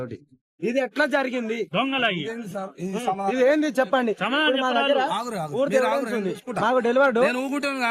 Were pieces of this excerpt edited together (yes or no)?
no